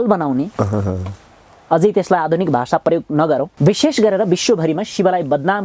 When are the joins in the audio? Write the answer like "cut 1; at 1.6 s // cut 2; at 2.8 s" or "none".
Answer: cut 1; at 3.5 s